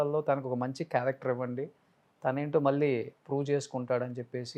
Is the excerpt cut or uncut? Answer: uncut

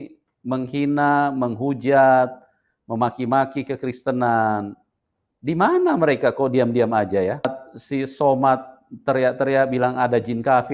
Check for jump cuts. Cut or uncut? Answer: cut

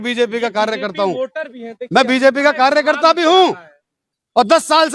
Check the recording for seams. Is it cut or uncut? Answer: uncut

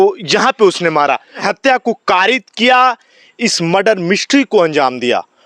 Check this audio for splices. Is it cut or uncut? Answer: cut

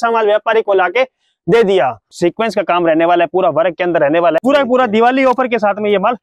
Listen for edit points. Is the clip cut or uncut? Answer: cut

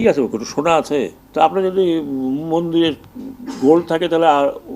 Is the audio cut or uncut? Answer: cut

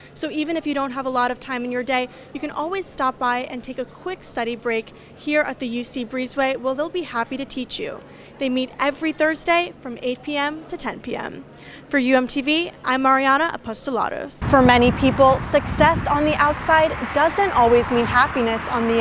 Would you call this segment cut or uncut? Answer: cut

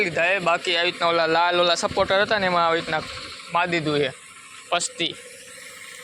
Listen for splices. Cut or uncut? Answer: uncut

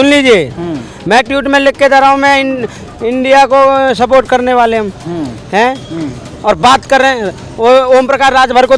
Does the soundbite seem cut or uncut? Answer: uncut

